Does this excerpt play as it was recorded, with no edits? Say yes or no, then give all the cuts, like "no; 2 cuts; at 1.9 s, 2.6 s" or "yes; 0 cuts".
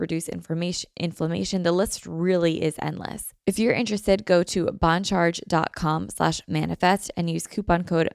no; 1 cut; at 3.3 s